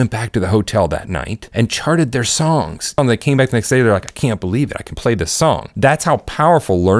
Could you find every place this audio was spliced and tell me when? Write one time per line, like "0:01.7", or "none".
0:01.4
0:02.9
0:05.7